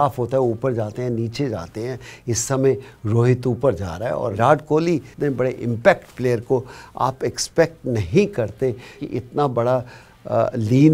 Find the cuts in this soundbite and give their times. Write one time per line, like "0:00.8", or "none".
0:04.3
0:05.1
0:09.0